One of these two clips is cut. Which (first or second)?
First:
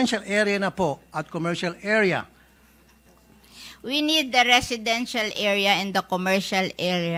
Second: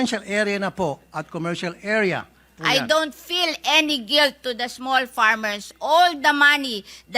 second